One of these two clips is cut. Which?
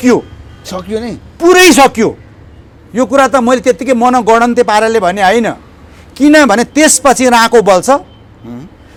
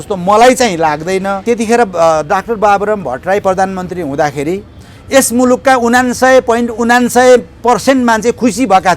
second; 1 cut; at 1.4 s

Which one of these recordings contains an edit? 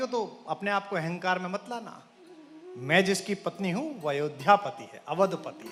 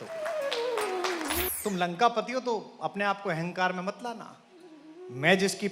second; 1 cut; at 1.4 s

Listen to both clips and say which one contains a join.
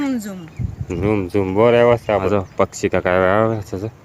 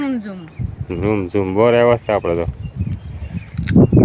first; 1 cut; at 2.2 s

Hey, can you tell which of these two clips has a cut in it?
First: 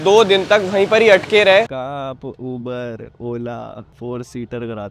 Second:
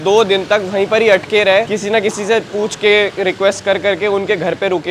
first; 1 cut; at 1.7 s

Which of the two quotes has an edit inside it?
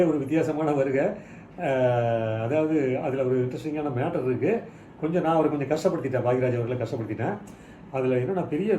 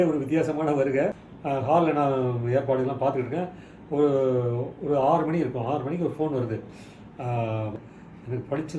second; 2 cuts; at 1.3 s, 7.7 s

